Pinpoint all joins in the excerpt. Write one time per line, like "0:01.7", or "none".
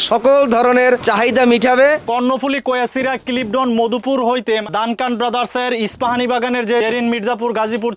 0:01.0
0:02.0
0:04.7
0:06.8